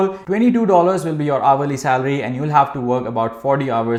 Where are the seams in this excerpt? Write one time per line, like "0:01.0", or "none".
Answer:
none